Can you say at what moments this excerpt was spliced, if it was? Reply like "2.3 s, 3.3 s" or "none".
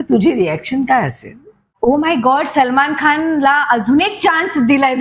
1.7 s